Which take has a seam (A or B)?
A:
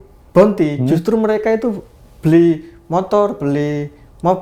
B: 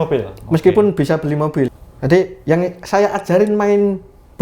B